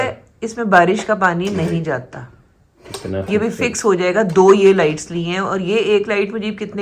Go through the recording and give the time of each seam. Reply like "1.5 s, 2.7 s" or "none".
none